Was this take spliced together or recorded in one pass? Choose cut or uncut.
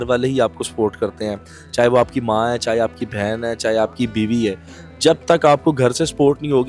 uncut